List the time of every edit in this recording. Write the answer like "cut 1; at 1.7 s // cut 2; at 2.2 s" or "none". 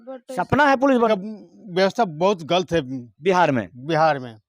cut 1; at 1.1 s